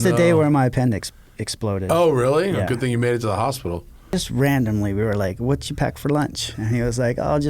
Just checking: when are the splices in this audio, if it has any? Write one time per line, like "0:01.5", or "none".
0:04.1